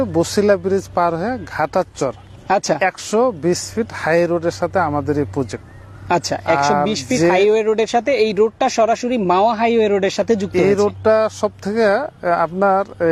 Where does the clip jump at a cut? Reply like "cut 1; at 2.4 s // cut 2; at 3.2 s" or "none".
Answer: none